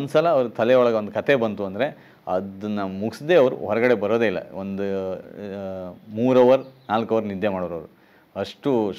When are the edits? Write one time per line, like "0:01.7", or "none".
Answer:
none